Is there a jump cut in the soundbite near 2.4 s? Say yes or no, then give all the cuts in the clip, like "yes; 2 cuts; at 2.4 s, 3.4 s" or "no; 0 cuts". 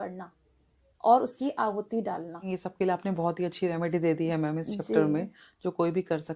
yes; 1 cut; at 2.4 s